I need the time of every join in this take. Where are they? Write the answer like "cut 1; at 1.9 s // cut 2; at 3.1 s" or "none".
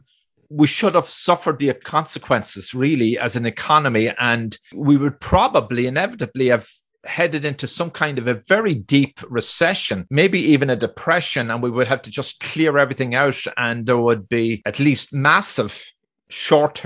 cut 1; at 1.8 s // cut 2; at 4.8 s